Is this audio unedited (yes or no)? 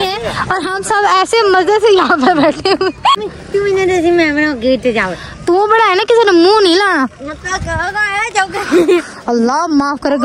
no